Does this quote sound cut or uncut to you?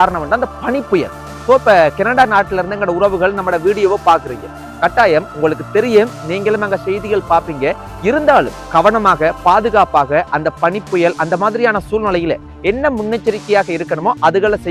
uncut